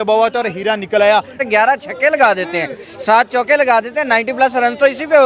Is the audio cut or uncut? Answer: cut